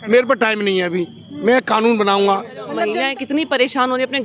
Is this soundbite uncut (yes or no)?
no